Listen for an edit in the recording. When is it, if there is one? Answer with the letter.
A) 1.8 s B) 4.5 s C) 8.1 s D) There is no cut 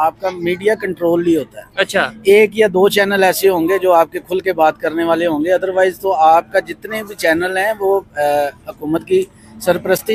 D